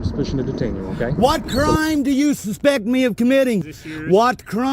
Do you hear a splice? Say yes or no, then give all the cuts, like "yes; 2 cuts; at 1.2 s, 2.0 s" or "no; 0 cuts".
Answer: yes; 1 cut; at 1.1 s